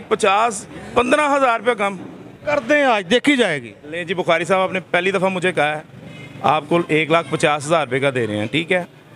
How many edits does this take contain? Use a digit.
0